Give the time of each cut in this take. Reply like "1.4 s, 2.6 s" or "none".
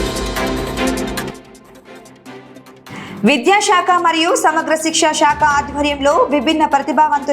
0.9 s